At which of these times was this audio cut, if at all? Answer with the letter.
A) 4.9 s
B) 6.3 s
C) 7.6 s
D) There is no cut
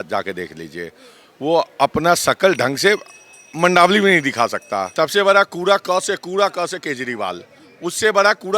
A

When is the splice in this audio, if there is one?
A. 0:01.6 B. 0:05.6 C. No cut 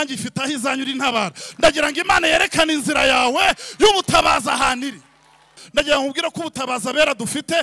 B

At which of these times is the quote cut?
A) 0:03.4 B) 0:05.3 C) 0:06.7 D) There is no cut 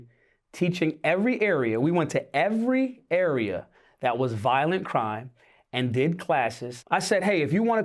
C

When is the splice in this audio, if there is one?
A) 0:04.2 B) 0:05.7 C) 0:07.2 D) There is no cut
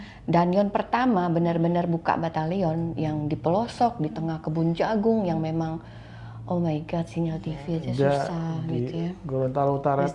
D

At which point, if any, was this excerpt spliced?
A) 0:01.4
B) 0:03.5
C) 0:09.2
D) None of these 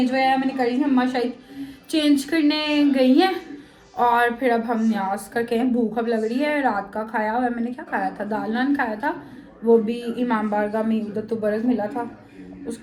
D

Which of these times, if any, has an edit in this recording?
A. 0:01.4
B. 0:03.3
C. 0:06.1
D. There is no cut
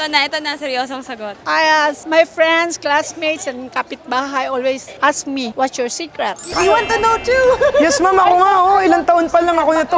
A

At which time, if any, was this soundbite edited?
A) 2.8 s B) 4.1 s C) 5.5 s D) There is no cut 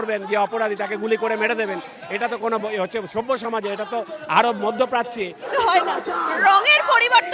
C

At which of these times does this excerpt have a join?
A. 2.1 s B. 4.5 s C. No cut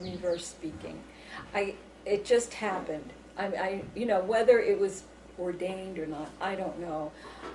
C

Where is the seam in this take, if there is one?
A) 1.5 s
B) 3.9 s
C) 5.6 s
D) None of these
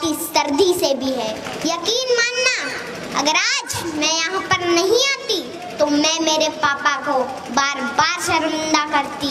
A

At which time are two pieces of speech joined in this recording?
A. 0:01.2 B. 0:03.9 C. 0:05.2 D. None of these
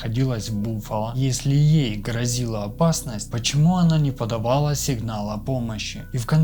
A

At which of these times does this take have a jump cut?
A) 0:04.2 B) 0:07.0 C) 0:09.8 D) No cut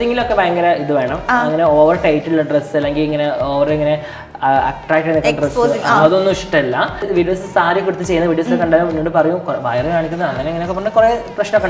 B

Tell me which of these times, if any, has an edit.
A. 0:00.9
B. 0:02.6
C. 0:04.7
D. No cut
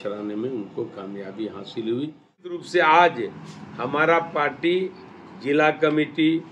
B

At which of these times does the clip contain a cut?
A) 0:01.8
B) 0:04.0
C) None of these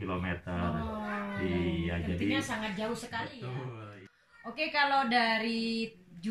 B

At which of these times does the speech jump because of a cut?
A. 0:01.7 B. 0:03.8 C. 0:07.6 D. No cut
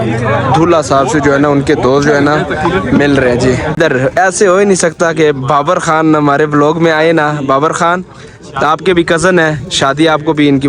B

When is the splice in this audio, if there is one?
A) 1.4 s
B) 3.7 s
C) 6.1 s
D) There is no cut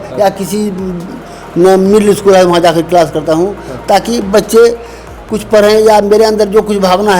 D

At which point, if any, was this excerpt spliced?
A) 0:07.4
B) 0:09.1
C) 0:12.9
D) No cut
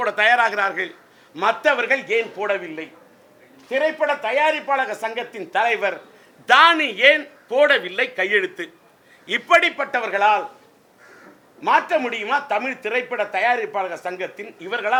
D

